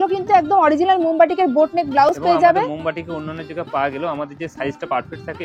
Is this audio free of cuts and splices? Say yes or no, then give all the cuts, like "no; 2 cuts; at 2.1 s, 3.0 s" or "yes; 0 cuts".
yes; 0 cuts